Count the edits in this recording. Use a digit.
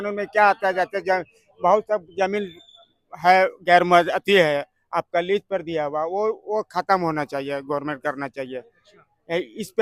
0